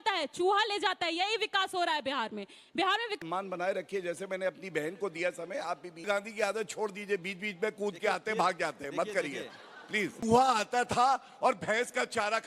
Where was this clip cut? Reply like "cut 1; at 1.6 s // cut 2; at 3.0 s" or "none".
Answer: cut 1; at 3.2 s // cut 2; at 6.0 s // cut 3; at 10.2 s